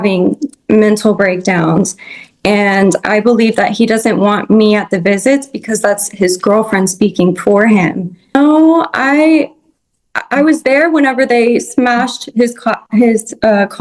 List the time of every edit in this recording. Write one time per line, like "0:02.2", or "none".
0:08.3